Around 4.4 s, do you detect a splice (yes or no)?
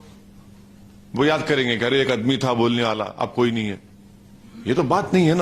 no